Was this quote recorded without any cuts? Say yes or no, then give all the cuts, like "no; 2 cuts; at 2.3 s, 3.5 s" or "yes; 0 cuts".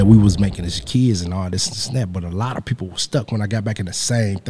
yes; 0 cuts